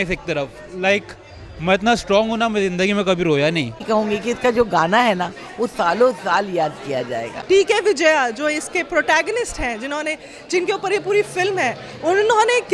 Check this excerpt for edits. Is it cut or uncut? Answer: cut